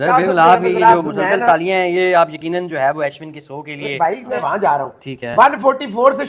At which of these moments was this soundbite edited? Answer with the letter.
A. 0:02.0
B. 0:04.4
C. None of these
B